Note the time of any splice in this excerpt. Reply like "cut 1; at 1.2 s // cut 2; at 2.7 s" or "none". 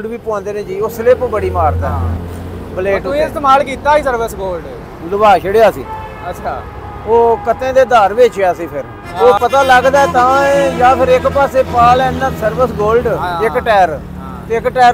cut 1; at 2.0 s // cut 2; at 8.7 s // cut 3; at 13.2 s